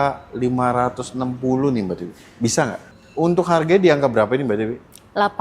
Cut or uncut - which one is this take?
cut